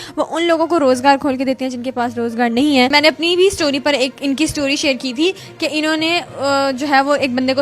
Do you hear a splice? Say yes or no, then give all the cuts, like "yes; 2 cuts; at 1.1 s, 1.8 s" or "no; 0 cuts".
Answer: yes; 1 cut; at 2.9 s